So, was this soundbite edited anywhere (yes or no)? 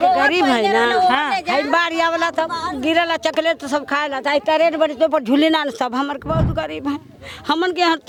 no